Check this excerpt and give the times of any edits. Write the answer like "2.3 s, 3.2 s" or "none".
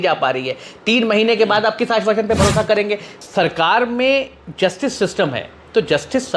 3.1 s